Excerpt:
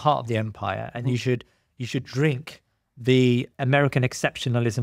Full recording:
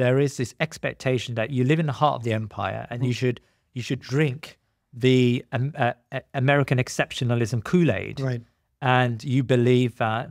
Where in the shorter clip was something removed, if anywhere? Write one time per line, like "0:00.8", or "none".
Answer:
0:03.5